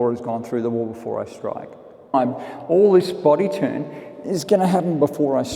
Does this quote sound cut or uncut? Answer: cut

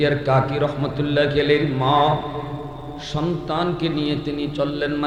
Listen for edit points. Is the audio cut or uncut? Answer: uncut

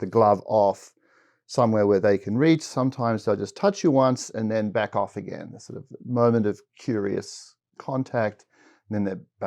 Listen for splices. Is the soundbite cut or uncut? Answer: uncut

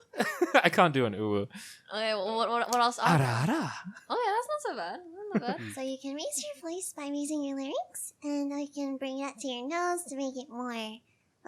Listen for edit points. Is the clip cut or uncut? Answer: cut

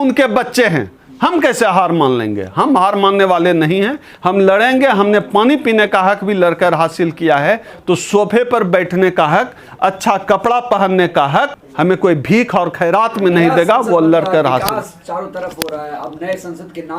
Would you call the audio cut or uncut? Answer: uncut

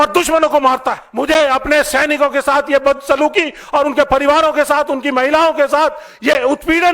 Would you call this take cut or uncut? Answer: cut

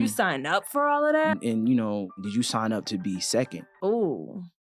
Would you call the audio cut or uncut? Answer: cut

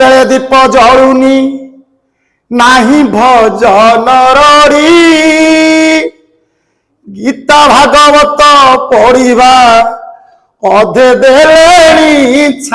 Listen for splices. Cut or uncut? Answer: uncut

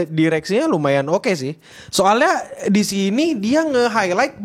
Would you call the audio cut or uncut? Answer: uncut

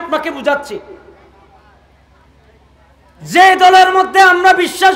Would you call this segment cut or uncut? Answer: uncut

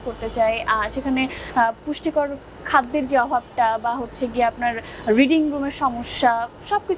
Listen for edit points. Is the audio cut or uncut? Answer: uncut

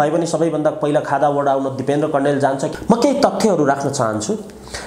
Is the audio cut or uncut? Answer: cut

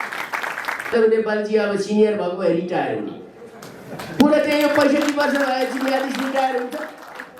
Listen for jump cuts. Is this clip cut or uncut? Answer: cut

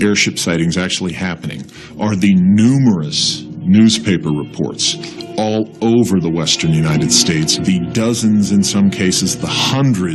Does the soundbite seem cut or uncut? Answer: cut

